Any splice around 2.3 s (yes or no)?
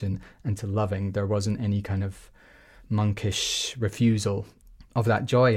no